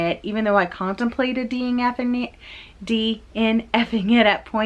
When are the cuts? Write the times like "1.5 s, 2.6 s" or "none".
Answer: none